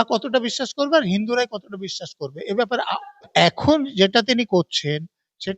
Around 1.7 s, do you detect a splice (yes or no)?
no